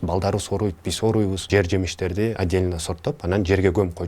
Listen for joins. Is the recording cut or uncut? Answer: cut